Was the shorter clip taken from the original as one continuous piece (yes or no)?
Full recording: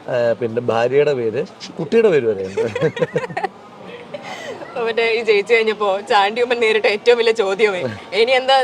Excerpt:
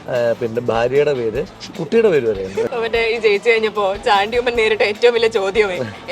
no